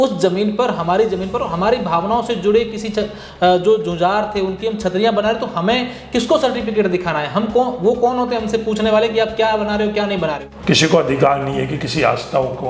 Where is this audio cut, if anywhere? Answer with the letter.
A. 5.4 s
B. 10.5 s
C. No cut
B